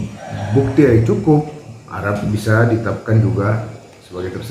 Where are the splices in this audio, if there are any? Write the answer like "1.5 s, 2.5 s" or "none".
none